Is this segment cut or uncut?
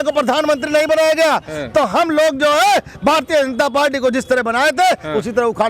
uncut